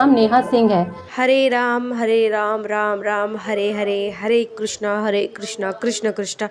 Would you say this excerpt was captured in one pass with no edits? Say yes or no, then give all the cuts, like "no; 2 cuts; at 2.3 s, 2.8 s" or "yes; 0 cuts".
no; 1 cut; at 1.1 s